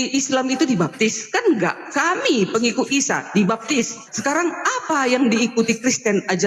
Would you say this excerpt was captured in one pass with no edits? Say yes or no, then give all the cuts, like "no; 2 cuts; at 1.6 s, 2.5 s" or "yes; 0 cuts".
no; 1 cut; at 4.1 s